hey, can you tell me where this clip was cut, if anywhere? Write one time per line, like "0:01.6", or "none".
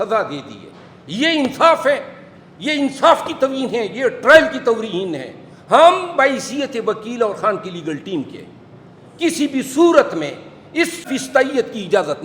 0:11.1